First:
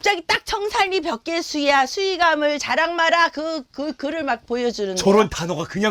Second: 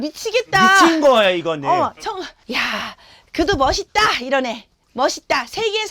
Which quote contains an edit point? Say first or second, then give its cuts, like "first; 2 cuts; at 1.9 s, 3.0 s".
second; 1 cut; at 2.4 s